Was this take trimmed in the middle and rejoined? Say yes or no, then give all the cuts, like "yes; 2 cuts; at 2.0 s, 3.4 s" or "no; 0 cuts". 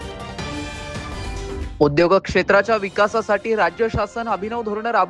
no; 0 cuts